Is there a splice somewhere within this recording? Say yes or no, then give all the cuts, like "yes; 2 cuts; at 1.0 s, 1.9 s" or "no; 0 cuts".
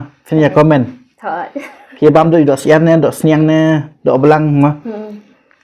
no; 0 cuts